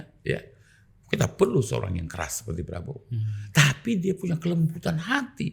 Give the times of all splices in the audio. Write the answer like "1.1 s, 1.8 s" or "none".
none